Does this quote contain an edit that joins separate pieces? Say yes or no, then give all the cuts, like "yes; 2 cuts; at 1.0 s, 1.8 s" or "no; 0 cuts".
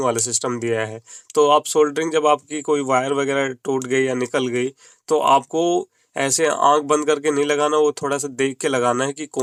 no; 0 cuts